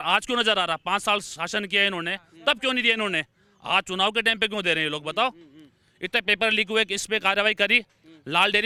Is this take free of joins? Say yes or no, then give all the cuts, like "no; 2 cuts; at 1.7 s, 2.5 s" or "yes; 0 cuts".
yes; 0 cuts